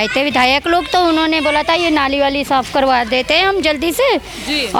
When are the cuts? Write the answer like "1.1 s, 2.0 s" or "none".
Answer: none